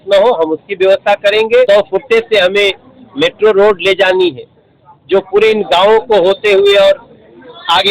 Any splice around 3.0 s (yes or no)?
no